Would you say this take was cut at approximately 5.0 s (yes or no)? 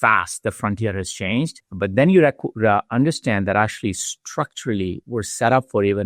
no